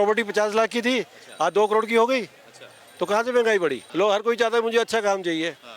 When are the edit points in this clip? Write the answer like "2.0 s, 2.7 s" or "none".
3.8 s